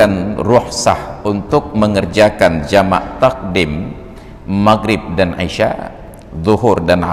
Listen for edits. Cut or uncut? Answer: uncut